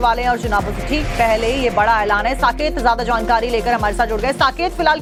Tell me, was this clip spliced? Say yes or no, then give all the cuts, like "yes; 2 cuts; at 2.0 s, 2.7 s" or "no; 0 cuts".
no; 0 cuts